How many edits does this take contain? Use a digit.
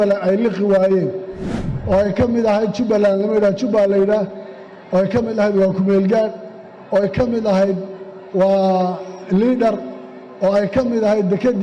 0